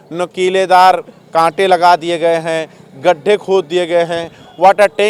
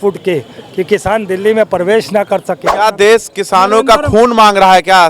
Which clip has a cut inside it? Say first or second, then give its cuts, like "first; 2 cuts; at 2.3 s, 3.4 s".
second; 1 cut; at 2.7 s